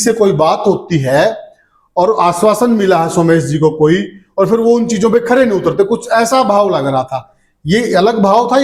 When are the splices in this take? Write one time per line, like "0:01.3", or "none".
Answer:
none